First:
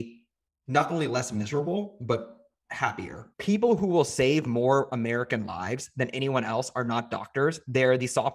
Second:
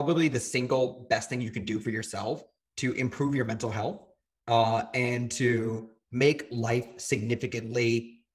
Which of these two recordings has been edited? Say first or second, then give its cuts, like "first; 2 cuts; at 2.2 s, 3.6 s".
first; 1 cut; at 3.2 s